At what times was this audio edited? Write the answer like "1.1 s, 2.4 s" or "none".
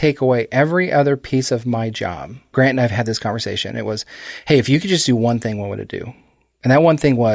2.5 s